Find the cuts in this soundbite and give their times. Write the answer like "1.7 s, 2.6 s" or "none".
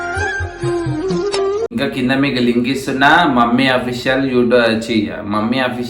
1.7 s